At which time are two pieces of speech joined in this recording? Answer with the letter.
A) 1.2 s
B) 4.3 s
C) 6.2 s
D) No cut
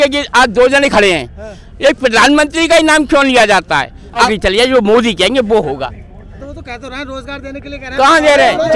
B